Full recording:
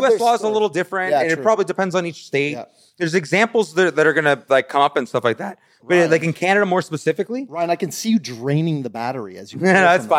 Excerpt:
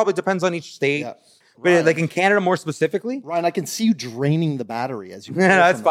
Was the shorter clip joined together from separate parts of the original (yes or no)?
yes